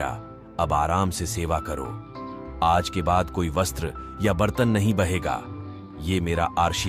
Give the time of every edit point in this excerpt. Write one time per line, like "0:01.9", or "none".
none